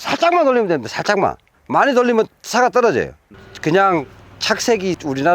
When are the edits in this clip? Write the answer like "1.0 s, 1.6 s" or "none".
3.2 s

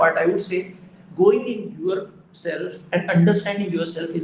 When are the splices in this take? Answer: none

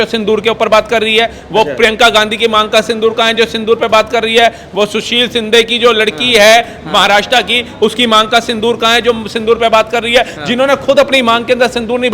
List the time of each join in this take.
none

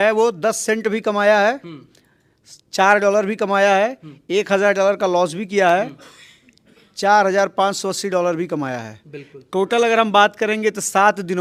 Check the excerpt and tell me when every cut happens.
none

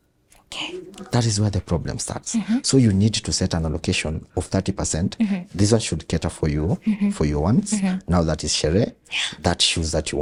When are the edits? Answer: none

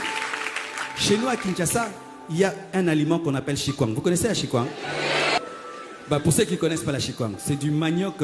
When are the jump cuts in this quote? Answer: 5.4 s

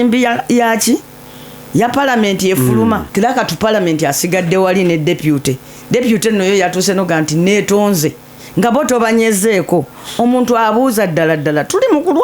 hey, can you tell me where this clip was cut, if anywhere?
3.1 s

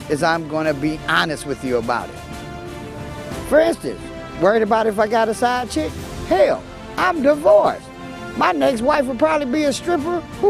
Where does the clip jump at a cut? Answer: none

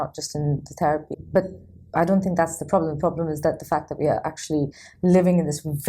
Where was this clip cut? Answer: 1.1 s

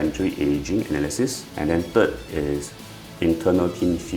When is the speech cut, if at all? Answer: 1.5 s

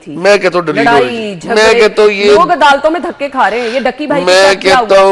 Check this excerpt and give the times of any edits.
none

